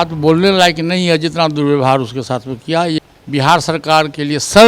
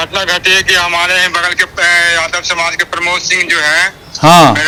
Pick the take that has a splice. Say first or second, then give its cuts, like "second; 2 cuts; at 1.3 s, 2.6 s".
first; 1 cut; at 3.0 s